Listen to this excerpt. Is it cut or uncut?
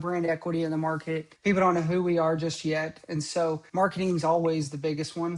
cut